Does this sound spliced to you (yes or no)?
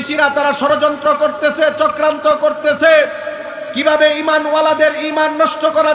no